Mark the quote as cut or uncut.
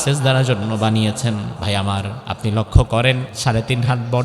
cut